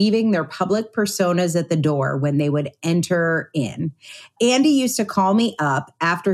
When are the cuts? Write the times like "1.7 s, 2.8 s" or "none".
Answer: 4.3 s